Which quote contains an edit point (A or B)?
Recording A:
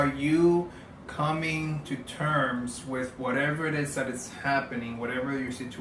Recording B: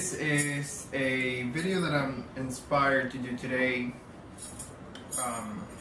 A